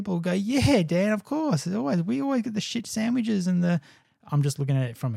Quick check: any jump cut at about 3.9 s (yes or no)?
yes